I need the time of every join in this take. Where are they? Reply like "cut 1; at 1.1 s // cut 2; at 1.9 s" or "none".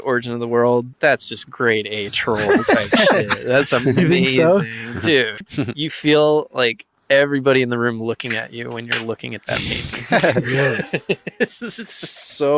cut 1; at 0.9 s // cut 2; at 5.4 s